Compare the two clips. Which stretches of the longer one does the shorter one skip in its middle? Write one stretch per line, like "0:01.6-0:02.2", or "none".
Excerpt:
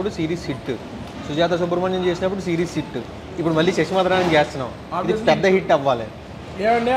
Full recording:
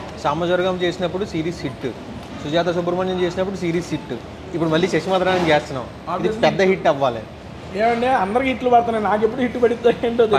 none